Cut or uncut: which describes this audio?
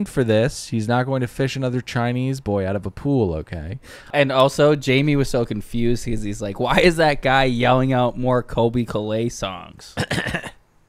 cut